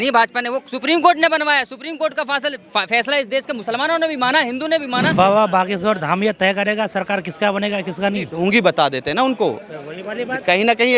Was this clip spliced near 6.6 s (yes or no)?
no